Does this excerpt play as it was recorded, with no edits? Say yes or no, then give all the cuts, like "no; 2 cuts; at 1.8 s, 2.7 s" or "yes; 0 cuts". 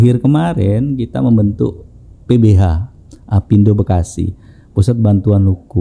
yes; 0 cuts